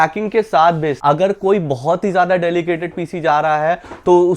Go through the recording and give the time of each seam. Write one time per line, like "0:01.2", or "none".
0:01.0